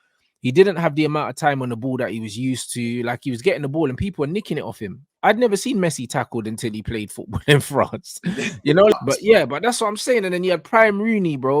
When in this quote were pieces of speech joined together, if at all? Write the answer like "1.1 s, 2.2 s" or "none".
8.9 s